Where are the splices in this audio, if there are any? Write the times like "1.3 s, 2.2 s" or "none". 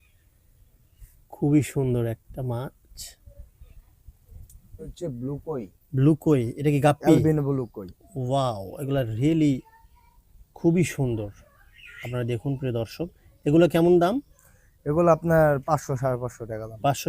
4.9 s